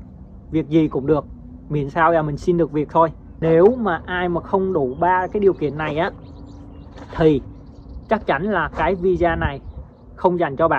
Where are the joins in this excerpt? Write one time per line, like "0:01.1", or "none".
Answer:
0:03.3